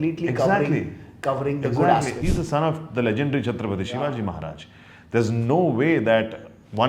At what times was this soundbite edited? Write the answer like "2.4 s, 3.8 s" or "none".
2.2 s